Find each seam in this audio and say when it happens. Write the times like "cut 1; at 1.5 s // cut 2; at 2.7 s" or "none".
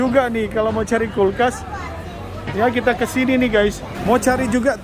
cut 1; at 3.9 s